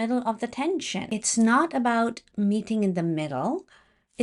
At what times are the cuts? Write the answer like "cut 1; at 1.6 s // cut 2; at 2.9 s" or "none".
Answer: cut 1; at 1.1 s